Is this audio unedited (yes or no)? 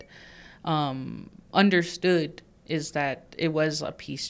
yes